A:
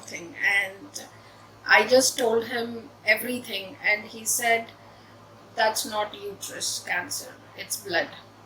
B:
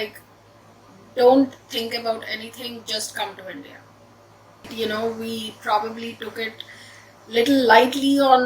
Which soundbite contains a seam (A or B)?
B